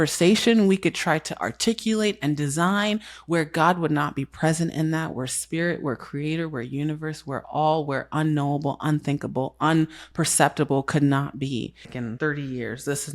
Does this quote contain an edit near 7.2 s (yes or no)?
no